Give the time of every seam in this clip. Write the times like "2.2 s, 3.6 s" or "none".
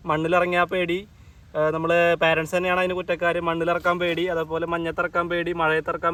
none

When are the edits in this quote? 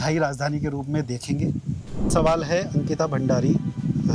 2.1 s

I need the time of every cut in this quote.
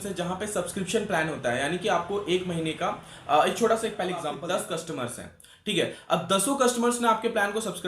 4.3 s

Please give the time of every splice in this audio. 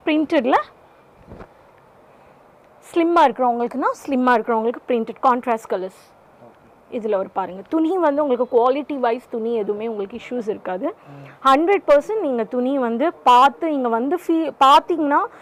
none

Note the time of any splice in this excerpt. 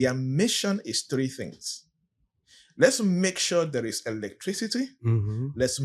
none

